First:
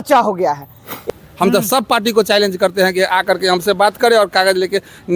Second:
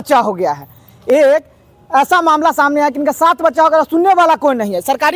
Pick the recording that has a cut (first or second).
first